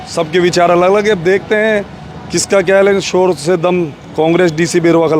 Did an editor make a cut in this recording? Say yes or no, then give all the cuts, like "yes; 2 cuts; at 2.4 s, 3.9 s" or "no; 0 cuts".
no; 0 cuts